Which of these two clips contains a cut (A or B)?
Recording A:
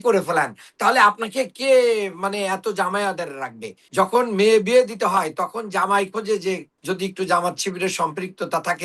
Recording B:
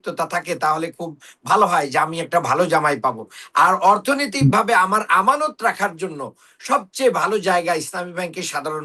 A